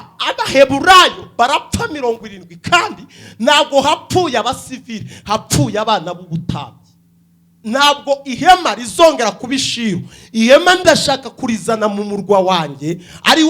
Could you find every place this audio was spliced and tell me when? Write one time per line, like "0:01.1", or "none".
0:07.6